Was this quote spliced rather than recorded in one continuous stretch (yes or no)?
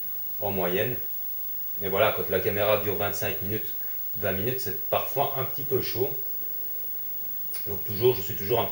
yes